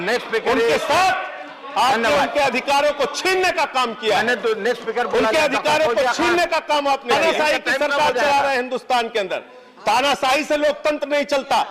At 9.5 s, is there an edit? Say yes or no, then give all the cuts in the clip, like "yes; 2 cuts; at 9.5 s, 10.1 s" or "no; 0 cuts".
no; 1 cut; at 7.1 s